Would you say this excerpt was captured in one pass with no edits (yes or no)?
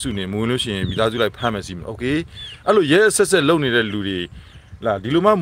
yes